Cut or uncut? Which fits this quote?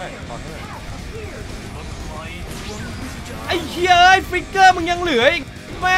uncut